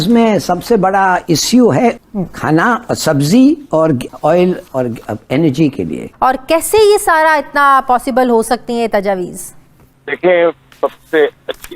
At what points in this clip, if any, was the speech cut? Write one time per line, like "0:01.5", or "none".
0:02.0
0:06.1